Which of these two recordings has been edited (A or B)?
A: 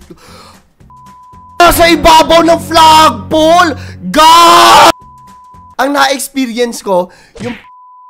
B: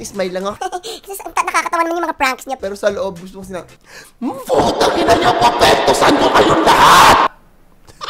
A